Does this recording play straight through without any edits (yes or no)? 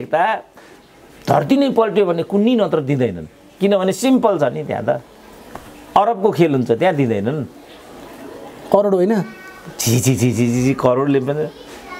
yes